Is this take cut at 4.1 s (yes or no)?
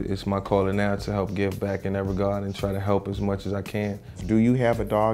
yes